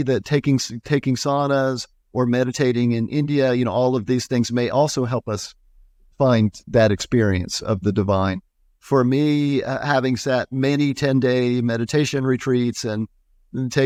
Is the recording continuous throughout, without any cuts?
yes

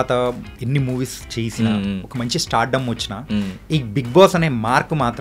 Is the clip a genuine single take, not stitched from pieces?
yes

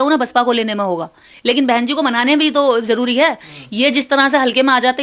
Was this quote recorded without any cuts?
yes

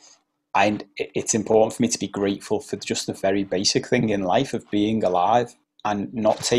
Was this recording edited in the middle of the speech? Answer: yes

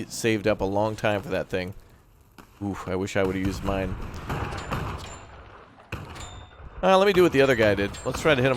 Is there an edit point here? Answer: yes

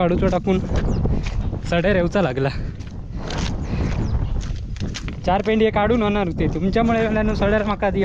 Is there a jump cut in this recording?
no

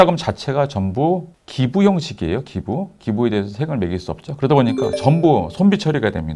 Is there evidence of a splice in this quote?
no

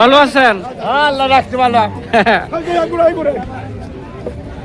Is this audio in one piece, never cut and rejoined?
yes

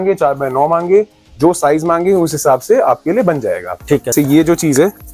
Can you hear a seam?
yes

